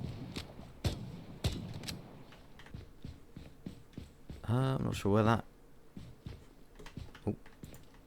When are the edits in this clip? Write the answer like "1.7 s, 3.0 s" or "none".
2.7 s

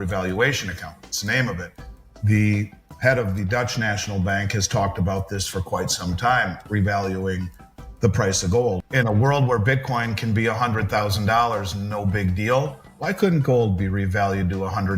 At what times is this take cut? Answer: 8.8 s

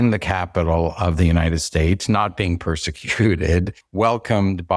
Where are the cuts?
3.8 s

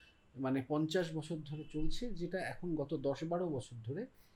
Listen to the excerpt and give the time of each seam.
none

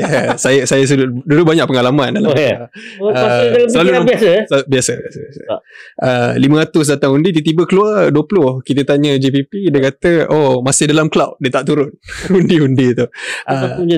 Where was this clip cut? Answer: none

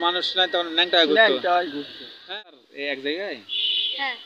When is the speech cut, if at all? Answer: 2.3 s

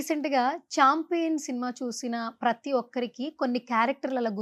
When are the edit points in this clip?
none

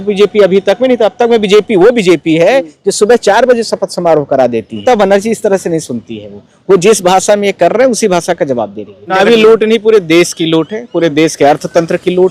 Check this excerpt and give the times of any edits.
4.8 s, 9.1 s

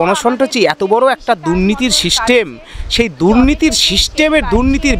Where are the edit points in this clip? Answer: none

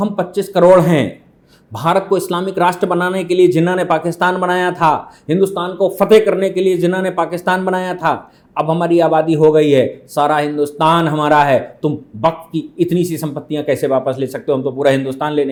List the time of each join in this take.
none

